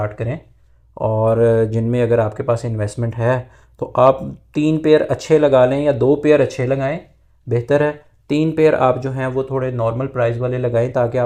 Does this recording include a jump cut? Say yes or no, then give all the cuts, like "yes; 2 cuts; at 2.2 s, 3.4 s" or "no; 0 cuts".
no; 0 cuts